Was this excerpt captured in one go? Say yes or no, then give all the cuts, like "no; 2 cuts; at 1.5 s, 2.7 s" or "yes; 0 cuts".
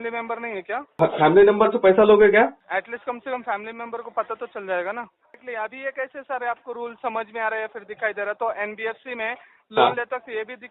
no; 3 cuts; at 0.9 s, 2.6 s, 5.4 s